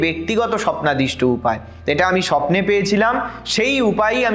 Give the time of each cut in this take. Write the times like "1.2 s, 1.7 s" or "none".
none